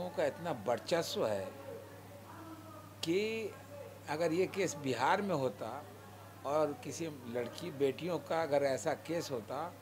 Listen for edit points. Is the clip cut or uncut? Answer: uncut